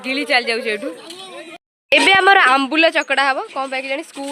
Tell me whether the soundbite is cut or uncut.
cut